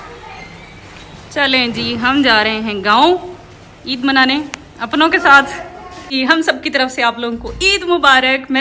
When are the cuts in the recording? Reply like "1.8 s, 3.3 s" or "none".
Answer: 6.0 s